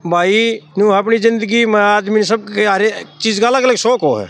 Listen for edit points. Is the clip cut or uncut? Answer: uncut